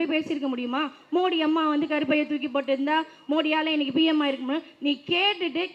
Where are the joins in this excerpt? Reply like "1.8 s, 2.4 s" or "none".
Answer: none